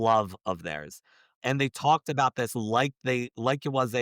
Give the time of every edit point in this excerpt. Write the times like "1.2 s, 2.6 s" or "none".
1.3 s